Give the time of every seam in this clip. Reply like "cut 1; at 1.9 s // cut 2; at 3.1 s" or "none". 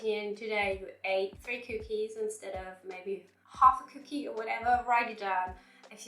cut 1; at 1.4 s